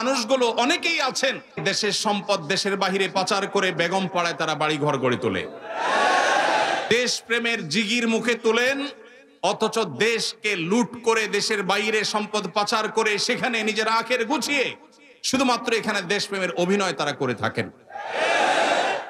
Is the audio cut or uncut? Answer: cut